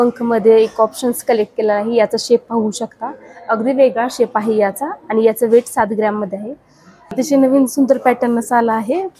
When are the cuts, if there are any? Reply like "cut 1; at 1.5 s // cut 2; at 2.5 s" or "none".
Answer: cut 1; at 7.1 s